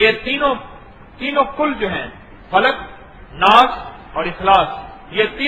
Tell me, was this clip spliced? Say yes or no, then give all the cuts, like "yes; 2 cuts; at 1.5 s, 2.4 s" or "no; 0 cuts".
yes; 1 cut; at 1.9 s